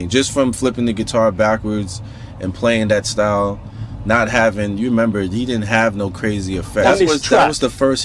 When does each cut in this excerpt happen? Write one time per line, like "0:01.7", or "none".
0:06.8